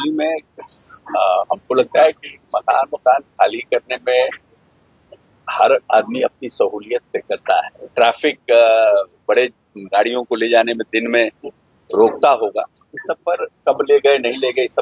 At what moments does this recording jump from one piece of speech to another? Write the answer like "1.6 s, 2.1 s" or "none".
7.8 s